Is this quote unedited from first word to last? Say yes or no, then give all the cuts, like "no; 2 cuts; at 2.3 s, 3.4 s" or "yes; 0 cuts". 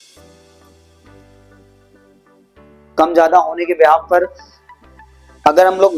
no; 1 cut; at 2.8 s